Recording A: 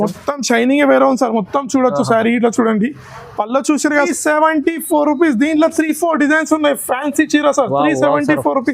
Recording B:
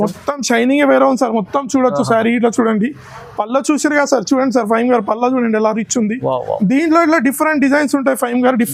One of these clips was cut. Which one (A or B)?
A